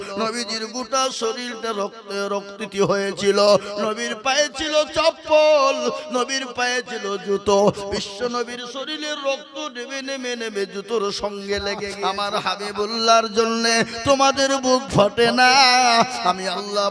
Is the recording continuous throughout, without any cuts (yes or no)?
no